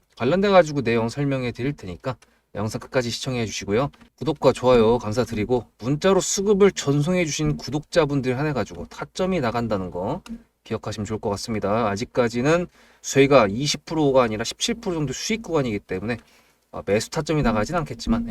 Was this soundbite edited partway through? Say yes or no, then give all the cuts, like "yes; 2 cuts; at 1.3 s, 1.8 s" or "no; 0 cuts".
yes; 1 cut; at 4.1 s